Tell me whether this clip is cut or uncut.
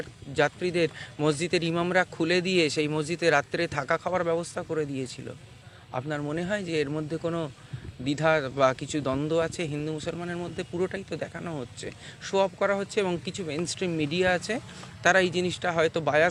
uncut